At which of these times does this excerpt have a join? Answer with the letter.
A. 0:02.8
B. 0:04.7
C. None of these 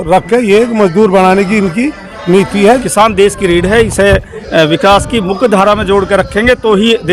A